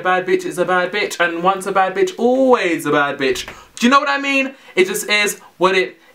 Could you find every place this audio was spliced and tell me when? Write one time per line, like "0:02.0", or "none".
none

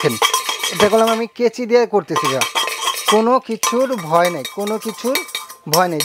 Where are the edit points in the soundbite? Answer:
none

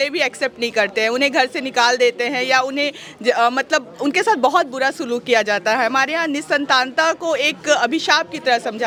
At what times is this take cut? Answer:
none

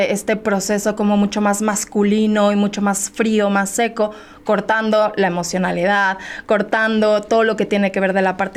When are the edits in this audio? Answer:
none

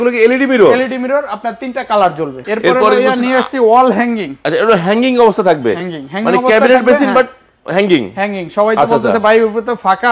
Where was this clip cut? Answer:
0:02.4

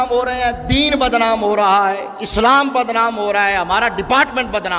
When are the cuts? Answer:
none

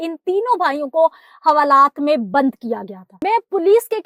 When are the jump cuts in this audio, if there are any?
0:03.0

